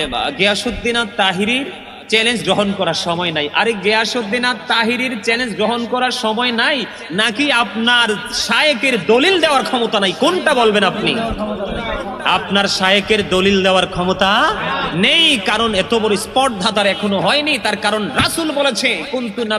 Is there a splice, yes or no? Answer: no